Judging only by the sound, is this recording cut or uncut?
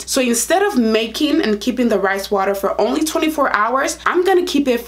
cut